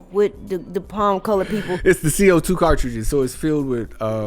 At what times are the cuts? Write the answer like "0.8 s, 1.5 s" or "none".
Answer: 1.8 s